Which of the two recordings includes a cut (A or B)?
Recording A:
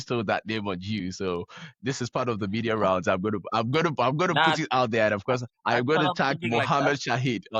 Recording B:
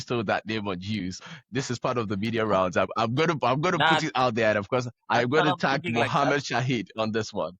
B